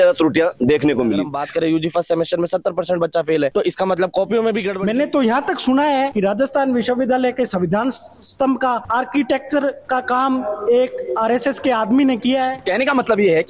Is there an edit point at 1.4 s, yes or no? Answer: yes